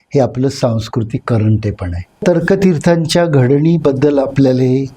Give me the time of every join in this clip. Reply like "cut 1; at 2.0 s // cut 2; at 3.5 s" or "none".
cut 1; at 2.2 s